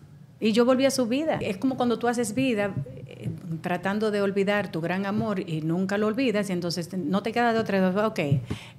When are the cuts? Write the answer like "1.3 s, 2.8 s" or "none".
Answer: 1.4 s